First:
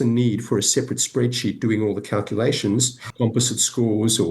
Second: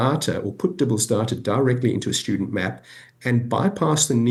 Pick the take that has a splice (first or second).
first